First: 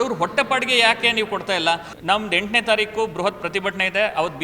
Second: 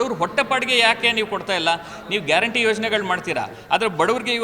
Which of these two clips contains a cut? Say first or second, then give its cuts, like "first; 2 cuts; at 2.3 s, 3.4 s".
first; 1 cut; at 1.9 s